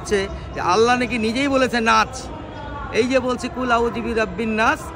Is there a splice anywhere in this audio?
no; 0 cuts

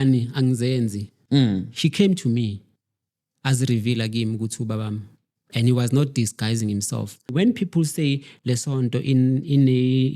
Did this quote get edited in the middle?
yes; 2 cuts; at 1.1 s, 7.3 s

